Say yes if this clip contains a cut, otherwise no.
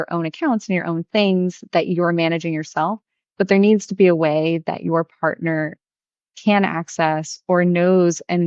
no